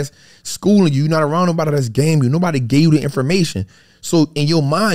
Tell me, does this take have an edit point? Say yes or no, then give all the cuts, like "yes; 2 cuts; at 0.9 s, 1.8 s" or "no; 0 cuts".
no; 0 cuts